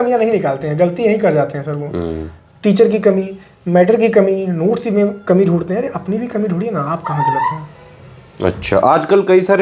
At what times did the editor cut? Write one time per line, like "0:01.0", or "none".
none